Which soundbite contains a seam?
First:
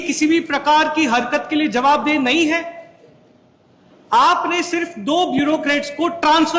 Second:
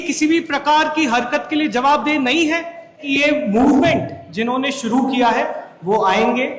second; 1 cut; at 3.0 s

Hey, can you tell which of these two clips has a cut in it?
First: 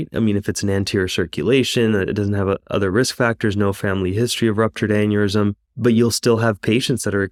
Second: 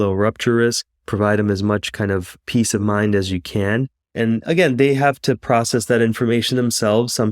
second; 1 cut; at 4.0 s

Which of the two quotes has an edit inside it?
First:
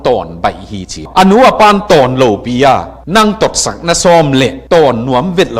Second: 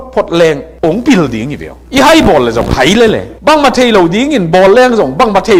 first; 1 cut; at 1.1 s

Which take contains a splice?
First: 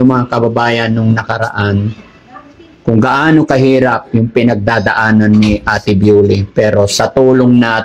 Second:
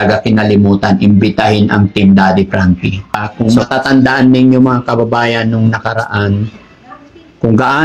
second; 1 cut; at 3.3 s

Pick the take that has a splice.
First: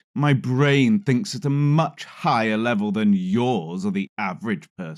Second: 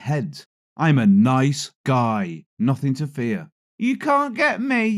second; 1 cut; at 3.7 s

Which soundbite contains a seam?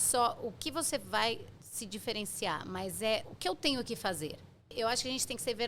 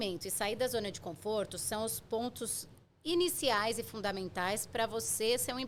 first; 2 cuts; at 3.3 s, 4.7 s

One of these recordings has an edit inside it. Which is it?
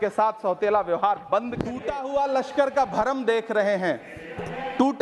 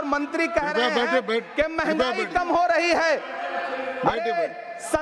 first; 1 cut; at 1.9 s

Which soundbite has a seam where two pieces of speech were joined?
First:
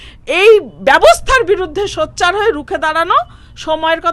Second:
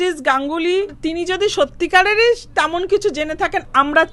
second; 1 cut; at 1.0 s

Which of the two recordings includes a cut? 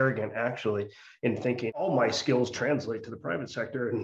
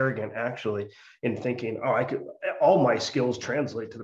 first; 1 cut; at 1.8 s

